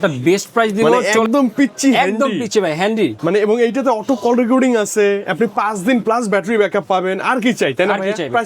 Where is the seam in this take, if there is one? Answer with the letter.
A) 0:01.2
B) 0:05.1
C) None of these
A